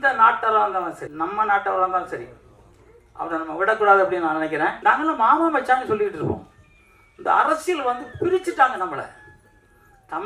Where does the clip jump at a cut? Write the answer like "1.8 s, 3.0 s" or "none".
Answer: 1.0 s, 4.8 s